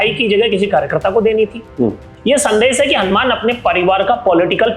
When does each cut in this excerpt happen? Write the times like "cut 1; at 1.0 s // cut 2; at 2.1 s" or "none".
cut 1; at 2.1 s